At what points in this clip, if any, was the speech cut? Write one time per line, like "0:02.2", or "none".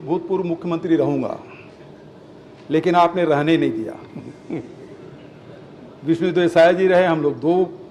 none